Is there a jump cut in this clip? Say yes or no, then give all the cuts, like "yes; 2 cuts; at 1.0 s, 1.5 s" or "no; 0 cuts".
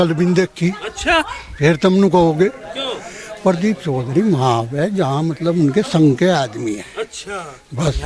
no; 0 cuts